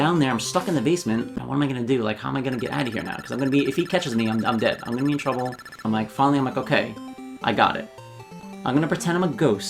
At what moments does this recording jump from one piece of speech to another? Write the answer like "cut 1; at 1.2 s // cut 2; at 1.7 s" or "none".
cut 1; at 1.4 s // cut 2; at 5.8 s